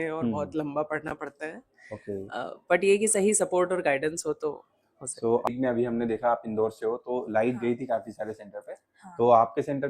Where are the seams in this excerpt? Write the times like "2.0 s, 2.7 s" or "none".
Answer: 5.5 s